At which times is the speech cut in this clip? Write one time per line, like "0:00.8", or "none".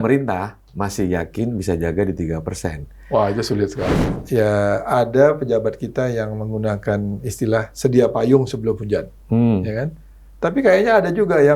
0:03.9